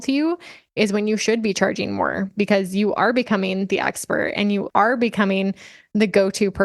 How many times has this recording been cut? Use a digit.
1